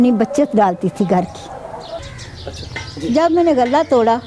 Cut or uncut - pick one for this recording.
cut